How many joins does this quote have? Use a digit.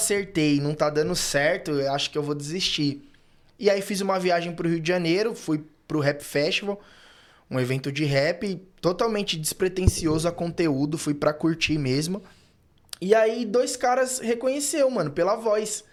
0